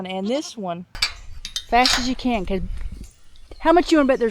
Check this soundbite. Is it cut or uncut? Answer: cut